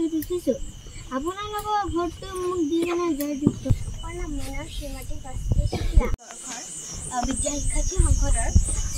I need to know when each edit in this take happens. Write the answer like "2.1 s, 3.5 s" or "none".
3.7 s, 6.3 s